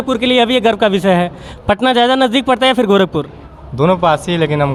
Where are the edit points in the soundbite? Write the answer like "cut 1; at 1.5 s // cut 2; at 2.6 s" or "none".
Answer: none

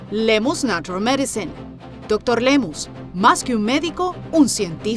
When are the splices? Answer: none

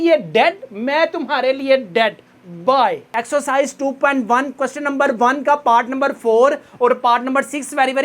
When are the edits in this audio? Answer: cut 1; at 3.0 s

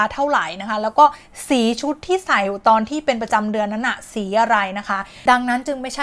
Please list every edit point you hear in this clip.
cut 1; at 5.1 s

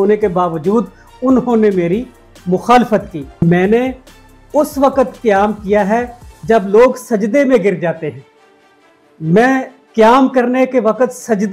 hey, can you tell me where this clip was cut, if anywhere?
cut 1; at 3.4 s

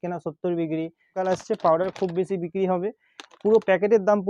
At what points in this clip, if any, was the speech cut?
cut 1; at 1.2 s

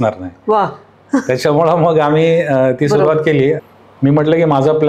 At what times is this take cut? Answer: cut 1; at 3.6 s

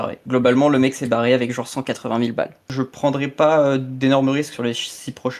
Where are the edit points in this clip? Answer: cut 1; at 2.7 s

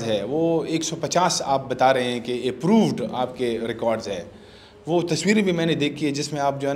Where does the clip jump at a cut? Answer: none

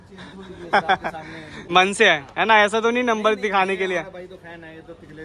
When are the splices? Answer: cut 1; at 1.6 s

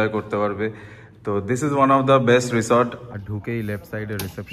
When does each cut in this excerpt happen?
cut 1; at 3.0 s

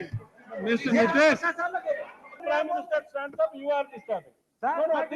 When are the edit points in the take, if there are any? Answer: cut 1; at 2.4 s

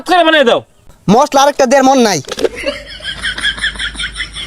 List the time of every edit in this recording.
cut 1; at 0.8 s // cut 2; at 2.7 s

